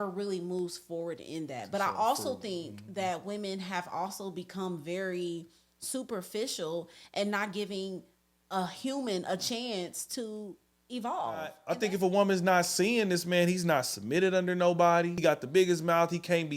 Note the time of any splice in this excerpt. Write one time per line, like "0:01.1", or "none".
0:11.6
0:15.2

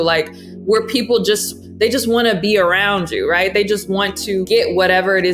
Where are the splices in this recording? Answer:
0:04.4

